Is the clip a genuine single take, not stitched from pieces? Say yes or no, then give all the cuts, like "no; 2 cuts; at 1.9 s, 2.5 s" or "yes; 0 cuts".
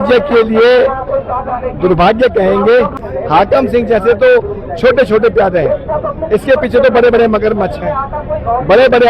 no; 1 cut; at 2.9 s